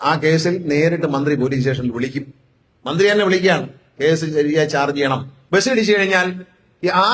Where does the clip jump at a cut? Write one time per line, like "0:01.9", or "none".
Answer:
0:05.3